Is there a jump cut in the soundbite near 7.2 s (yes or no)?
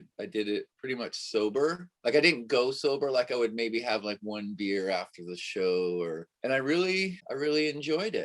yes